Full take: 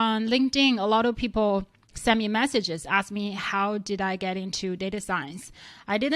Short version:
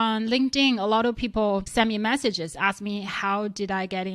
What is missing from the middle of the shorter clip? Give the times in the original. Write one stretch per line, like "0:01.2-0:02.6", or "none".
0:01.7-0:02.0